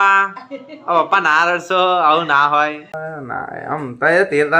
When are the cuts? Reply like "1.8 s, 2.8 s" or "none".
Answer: 2.9 s